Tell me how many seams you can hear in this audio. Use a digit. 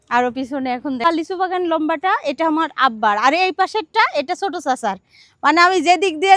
1